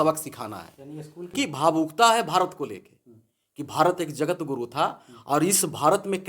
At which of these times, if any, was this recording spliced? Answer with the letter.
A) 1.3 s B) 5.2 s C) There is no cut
A